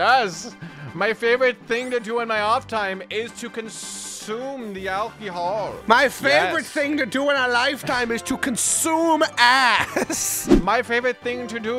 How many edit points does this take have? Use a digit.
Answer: 1